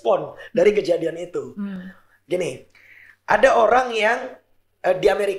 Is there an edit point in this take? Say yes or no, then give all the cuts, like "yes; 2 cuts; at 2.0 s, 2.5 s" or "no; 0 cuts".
no; 0 cuts